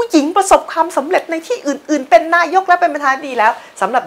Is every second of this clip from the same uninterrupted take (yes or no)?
yes